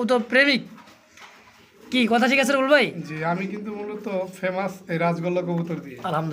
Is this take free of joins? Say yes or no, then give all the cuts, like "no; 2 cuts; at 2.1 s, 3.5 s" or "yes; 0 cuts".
yes; 0 cuts